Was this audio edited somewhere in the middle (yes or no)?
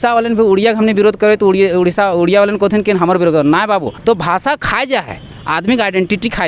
yes